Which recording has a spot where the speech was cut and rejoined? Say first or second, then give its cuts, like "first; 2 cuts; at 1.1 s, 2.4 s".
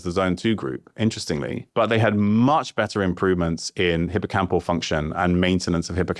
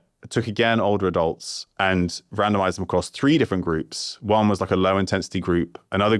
first; 1 cut; at 1.6 s